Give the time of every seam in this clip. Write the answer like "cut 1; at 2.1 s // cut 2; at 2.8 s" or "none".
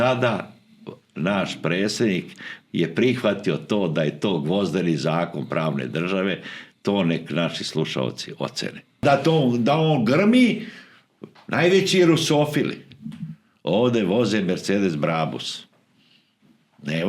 cut 1; at 9.0 s